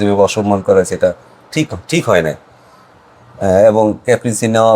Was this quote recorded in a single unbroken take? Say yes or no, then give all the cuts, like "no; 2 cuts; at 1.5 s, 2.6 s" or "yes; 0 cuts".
yes; 0 cuts